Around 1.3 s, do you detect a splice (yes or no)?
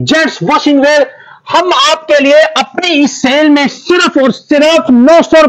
no